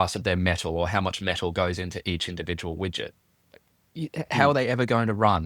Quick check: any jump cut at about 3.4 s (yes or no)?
no